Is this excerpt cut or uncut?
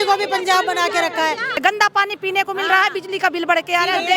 cut